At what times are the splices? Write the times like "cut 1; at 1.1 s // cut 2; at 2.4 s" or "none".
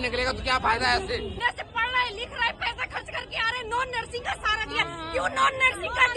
cut 1; at 1.4 s